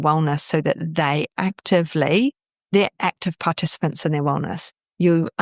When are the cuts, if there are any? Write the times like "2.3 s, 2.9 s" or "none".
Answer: none